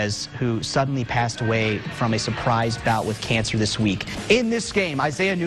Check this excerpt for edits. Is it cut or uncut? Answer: cut